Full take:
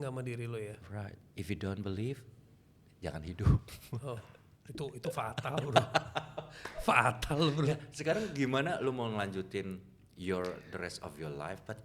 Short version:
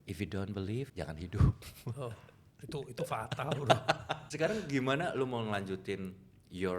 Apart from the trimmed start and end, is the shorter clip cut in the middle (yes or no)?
yes